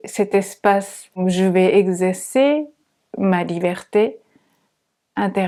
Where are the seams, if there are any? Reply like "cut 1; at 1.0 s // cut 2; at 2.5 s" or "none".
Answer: none